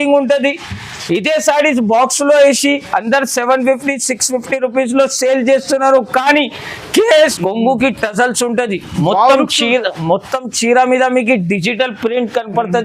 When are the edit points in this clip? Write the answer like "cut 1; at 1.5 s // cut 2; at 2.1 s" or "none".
cut 1; at 7.3 s

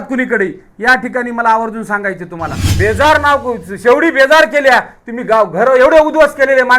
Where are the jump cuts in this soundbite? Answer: cut 1; at 2.7 s

